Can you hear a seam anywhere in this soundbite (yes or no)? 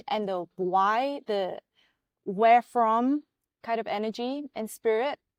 no